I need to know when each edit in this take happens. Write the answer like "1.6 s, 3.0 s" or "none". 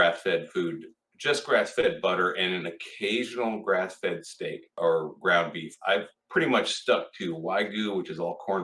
4.6 s, 6.2 s